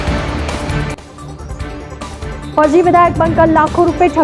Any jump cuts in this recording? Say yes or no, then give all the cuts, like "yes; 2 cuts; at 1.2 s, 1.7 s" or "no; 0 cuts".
no; 0 cuts